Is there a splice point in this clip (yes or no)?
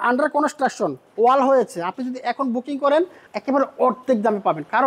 yes